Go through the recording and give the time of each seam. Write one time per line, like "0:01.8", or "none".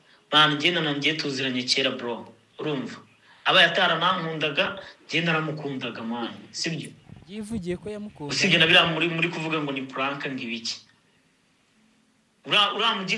none